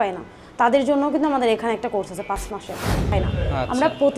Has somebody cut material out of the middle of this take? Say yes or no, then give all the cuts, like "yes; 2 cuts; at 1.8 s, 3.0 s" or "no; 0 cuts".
yes; 1 cut; at 3.1 s